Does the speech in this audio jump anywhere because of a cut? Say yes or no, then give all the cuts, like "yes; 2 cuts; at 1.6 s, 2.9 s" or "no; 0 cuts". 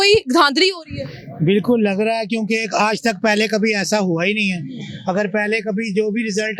no; 0 cuts